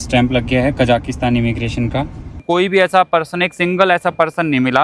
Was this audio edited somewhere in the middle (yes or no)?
yes